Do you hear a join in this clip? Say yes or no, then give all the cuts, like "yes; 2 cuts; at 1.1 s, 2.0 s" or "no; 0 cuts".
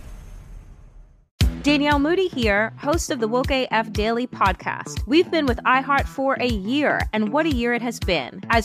yes; 1 cut; at 1.2 s